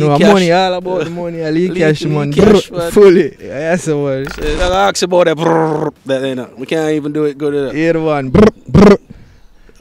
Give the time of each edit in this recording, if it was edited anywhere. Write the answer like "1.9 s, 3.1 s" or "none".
4.5 s